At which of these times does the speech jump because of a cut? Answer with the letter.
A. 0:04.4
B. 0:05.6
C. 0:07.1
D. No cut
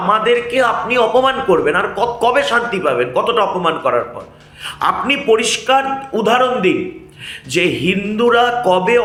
D